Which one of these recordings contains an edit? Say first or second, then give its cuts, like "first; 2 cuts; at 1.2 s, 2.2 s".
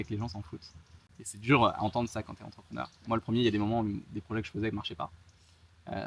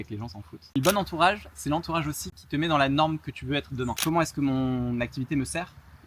second; 3 cuts; at 0.8 s, 2.4 s, 4.0 s